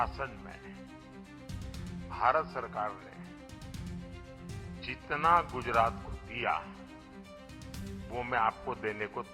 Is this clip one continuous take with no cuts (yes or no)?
no